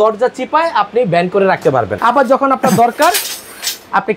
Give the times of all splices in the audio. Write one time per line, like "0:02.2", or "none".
0:01.9